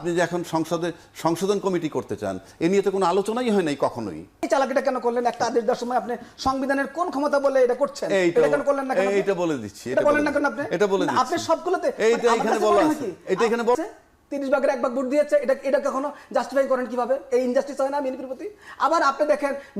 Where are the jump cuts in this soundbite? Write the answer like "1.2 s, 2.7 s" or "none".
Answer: 4.5 s, 13.8 s